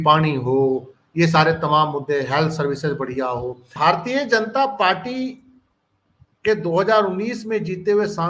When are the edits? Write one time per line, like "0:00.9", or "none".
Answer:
0:03.7